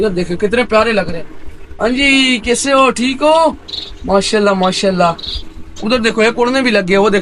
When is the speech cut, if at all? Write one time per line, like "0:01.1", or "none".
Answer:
none